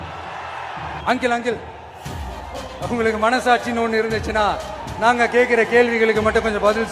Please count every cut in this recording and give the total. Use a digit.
1